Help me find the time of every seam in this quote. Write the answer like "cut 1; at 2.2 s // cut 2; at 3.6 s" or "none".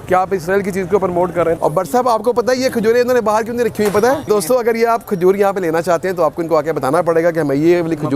cut 1; at 1.6 s // cut 2; at 4.3 s